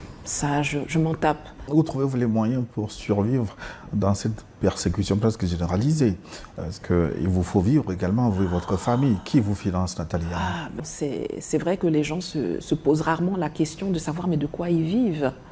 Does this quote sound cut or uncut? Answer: cut